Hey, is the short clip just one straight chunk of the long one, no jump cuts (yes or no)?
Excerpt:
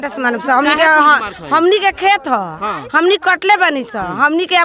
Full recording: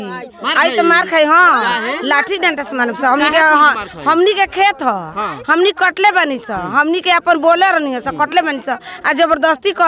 yes